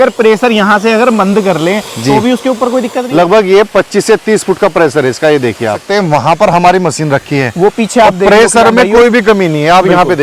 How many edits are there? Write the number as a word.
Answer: two